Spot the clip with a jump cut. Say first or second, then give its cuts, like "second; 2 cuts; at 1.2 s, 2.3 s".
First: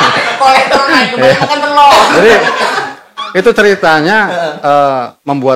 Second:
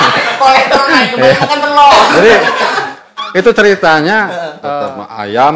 second; 1 cut; at 4.6 s